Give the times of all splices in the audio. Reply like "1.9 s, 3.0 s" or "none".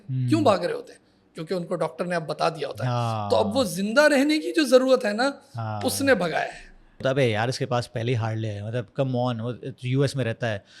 7.0 s